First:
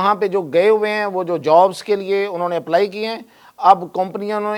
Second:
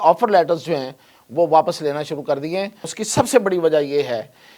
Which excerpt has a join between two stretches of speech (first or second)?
second